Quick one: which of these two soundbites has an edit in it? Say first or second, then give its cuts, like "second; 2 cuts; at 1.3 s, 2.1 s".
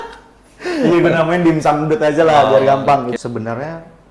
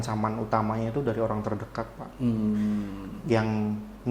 first; 1 cut; at 3.1 s